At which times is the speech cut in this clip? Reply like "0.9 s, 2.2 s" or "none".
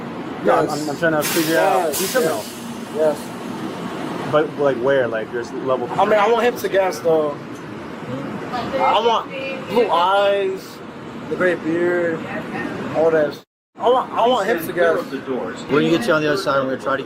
15.7 s